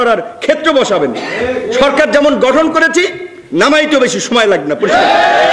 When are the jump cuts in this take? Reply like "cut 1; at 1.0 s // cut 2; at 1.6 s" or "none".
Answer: none